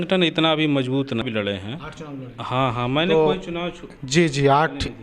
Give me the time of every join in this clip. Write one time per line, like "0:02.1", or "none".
0:01.2

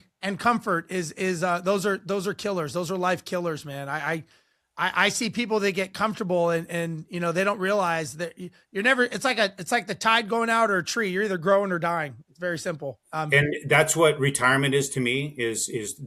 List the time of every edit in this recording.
none

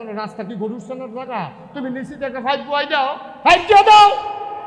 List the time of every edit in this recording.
0:03.3

